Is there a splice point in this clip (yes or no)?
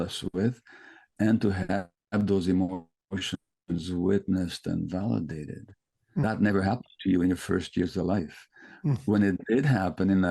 yes